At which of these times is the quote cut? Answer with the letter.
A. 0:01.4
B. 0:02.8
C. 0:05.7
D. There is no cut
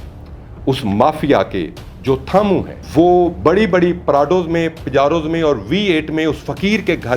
B